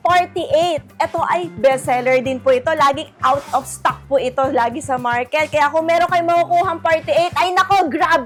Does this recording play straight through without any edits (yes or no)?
yes